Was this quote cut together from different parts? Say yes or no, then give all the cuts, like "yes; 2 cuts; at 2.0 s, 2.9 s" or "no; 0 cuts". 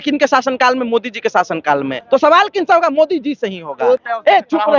yes; 2 cuts; at 2.0 s, 4.0 s